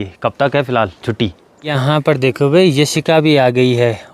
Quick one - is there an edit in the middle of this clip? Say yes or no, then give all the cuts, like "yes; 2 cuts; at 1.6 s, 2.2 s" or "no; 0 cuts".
yes; 1 cut; at 1.8 s